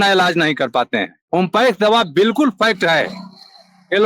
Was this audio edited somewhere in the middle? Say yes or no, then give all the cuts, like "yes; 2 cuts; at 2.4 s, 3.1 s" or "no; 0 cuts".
yes; 1 cut; at 1.2 s